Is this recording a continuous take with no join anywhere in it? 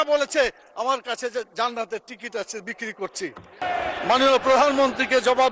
no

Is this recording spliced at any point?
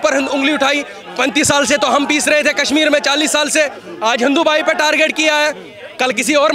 no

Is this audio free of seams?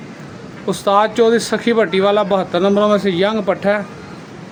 yes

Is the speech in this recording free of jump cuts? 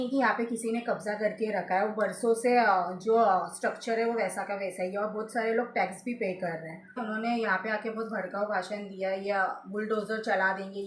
no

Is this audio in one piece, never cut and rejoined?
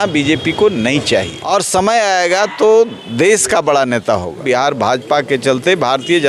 no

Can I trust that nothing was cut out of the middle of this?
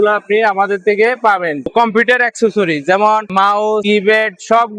no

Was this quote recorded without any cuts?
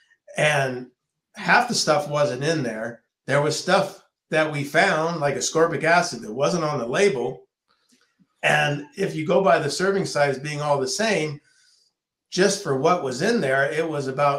yes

